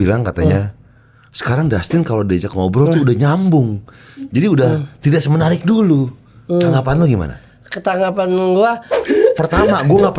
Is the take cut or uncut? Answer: cut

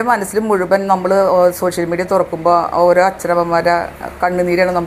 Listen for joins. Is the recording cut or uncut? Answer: uncut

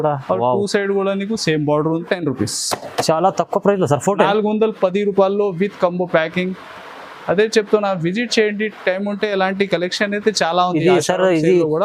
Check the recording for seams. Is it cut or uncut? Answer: cut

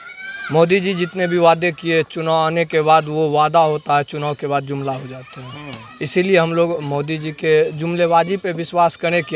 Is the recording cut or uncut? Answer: uncut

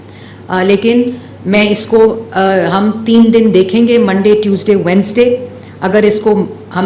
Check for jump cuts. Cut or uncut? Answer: uncut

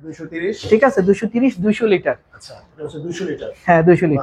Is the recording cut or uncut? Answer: uncut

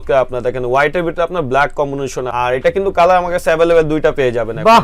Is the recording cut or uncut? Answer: uncut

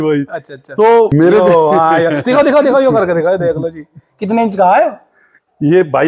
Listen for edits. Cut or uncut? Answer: cut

